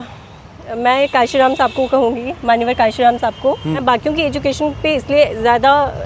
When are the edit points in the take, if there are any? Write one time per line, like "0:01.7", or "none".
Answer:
0:03.8